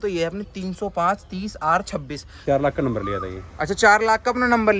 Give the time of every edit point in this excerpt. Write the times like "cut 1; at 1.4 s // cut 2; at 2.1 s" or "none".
cut 1; at 2.4 s